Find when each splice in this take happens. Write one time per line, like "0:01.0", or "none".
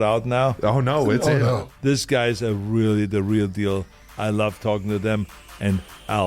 none